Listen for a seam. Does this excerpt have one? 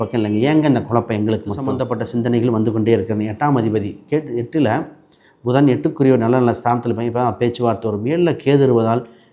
yes; 1 cut; at 1.8 s

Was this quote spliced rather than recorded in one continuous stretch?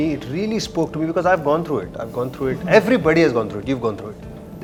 no; 0 cuts

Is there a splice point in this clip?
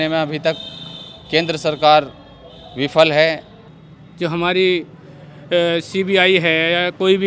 yes; 1 cut; at 3.5 s

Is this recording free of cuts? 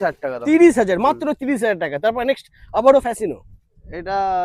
yes; 0 cuts

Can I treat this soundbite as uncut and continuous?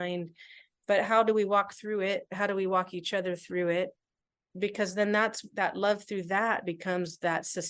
yes; 0 cuts

